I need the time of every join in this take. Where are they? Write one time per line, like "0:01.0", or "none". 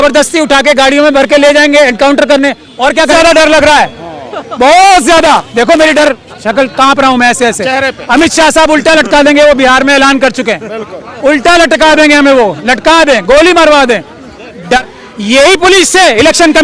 0:03.1
0:14.8